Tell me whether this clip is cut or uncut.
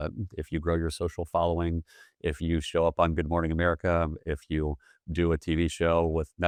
uncut